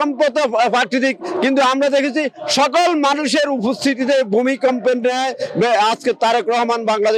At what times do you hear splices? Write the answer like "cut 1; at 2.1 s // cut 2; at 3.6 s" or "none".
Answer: none